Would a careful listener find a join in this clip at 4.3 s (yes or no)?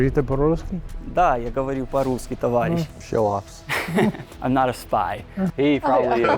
yes